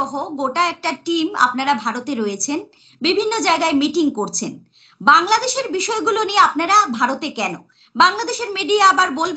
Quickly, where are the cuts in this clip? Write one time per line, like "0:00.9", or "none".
none